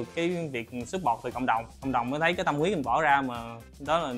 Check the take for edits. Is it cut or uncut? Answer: uncut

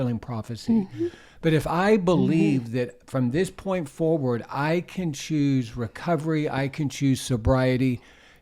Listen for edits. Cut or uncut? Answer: uncut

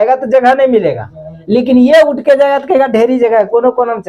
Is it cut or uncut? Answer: uncut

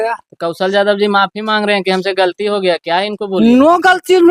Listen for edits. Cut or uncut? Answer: uncut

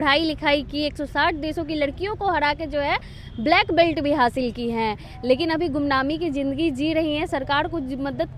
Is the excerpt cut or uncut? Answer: uncut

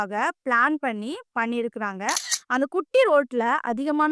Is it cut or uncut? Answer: cut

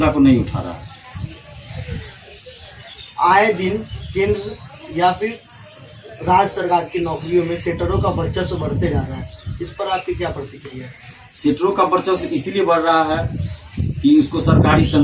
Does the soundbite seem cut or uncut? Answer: uncut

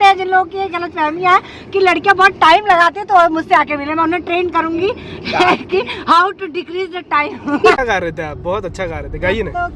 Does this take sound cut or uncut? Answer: cut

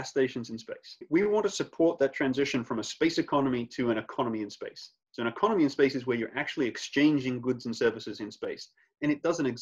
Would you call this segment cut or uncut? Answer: cut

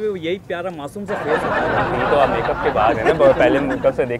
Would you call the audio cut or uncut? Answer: uncut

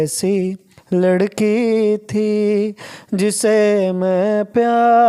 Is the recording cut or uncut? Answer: uncut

